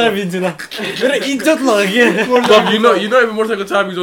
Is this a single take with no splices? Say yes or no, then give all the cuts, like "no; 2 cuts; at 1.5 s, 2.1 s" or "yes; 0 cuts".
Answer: yes; 0 cuts